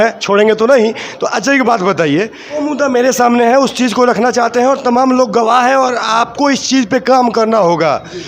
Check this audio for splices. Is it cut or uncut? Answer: cut